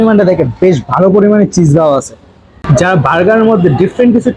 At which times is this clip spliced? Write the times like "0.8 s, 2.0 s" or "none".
2.7 s